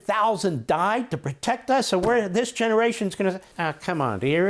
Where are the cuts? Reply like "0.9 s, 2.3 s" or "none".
3.5 s